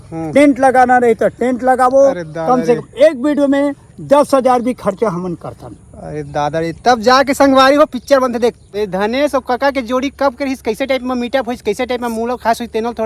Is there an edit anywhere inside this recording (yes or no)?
yes